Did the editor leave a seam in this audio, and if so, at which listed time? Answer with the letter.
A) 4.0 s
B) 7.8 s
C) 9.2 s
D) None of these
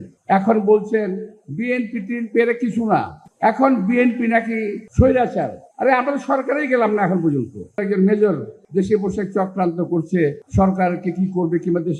B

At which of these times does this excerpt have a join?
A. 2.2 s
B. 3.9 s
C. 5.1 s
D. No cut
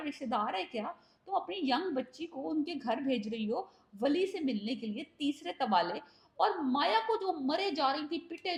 D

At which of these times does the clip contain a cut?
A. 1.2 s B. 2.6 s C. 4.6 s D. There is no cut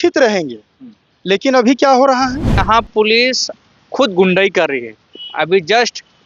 B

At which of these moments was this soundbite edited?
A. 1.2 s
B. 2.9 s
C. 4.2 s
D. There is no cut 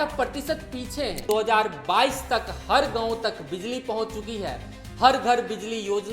A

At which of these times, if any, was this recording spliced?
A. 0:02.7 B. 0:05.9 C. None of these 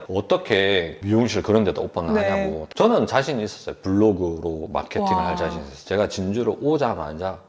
A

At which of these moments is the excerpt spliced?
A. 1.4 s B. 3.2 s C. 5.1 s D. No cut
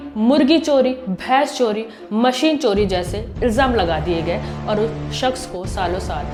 D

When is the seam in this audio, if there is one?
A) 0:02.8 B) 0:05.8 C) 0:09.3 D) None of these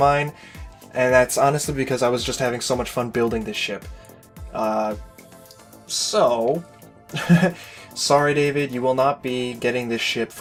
D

